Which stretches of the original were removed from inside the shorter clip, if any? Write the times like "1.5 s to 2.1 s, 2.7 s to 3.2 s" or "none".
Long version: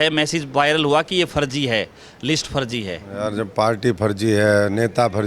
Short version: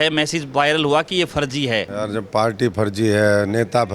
1.9 s to 3.1 s